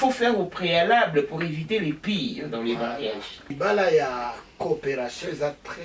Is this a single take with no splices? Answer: no; 1 cut; at 3.5 s

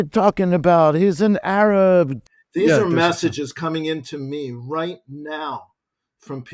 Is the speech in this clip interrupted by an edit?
yes; 1 cut; at 2.2 s

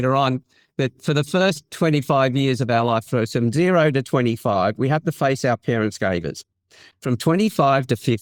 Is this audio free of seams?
yes; 0 cuts

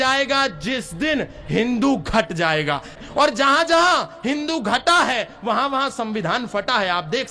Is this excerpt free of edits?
no; 1 cut; at 3.0 s

